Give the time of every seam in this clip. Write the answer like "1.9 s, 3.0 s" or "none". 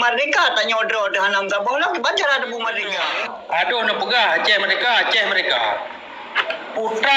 3.1 s

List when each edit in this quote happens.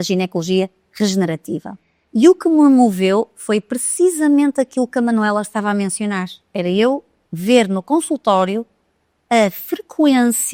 none

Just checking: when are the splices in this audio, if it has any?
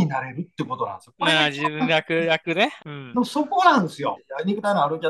2.8 s, 4.2 s

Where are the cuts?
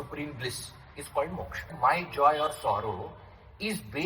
1.7 s

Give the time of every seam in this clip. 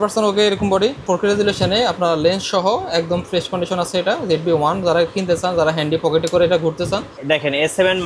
1.0 s, 7.1 s

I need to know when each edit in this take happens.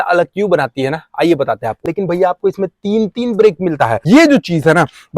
1.9 s, 4.0 s

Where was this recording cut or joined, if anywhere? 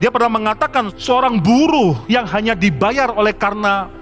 0.9 s

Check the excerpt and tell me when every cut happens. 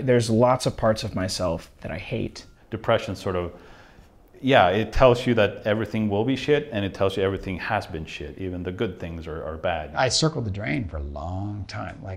2.5 s, 10.0 s

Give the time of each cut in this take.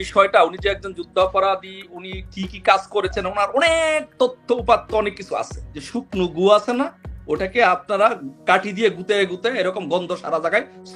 none

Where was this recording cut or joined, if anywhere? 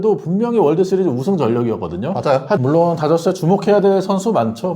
2.6 s

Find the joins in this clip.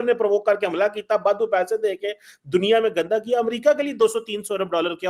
none

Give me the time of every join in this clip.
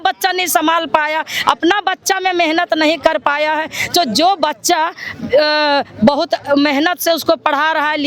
none

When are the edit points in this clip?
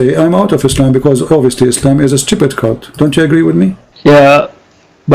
3.9 s

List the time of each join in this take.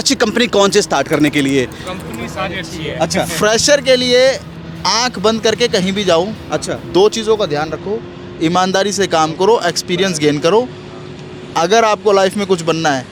none

